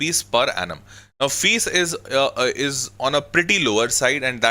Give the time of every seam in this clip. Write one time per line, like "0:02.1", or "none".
none